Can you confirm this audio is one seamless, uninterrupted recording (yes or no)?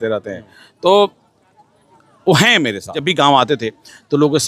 no